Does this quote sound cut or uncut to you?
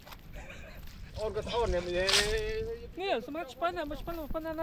uncut